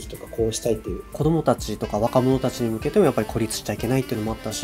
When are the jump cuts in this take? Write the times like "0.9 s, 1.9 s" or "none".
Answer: 1.2 s